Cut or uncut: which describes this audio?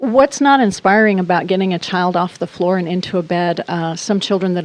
uncut